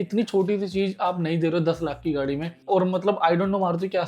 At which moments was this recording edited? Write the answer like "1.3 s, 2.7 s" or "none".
2.6 s